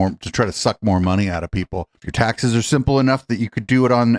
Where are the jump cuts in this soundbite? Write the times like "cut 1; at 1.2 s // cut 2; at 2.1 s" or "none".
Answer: none